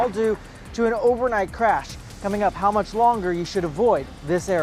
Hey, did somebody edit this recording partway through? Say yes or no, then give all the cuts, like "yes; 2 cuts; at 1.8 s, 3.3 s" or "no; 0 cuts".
no; 0 cuts